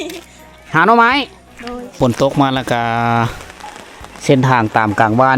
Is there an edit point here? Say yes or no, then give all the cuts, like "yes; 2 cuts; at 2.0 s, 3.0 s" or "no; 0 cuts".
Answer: yes; 1 cut; at 1.9 s